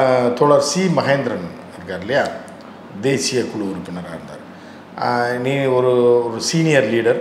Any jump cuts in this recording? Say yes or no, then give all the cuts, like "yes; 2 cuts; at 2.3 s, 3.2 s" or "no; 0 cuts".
no; 0 cuts